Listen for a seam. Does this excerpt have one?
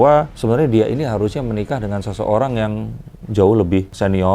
no; 0 cuts

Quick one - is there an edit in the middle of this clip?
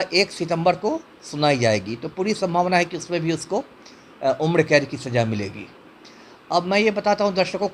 no; 0 cuts

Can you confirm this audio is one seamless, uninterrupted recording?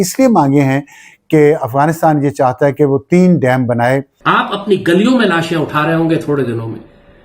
no; 1 cut; at 4.1 s

